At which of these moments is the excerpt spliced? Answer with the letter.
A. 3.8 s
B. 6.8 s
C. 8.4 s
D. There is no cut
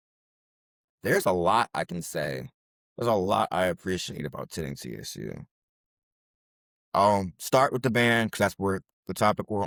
D